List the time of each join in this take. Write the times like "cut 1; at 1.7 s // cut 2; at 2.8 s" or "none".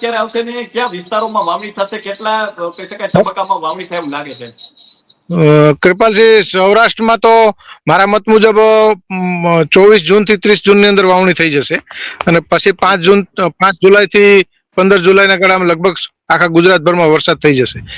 none